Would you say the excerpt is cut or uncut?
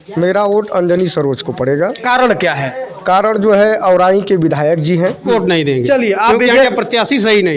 cut